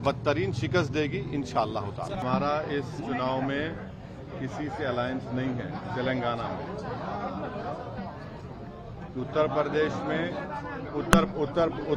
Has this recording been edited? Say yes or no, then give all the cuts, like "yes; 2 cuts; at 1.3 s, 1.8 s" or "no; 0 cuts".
yes; 1 cut; at 1.7 s